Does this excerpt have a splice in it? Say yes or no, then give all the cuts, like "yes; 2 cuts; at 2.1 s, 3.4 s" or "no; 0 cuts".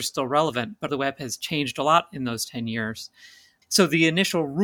yes; 2 cuts; at 0.9 s, 3.5 s